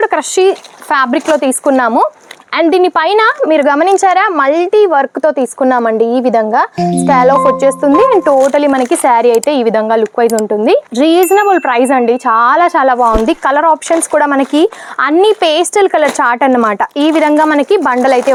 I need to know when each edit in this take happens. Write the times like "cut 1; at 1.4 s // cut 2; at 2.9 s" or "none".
none